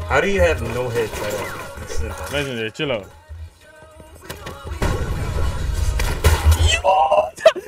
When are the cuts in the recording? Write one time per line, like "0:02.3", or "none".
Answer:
none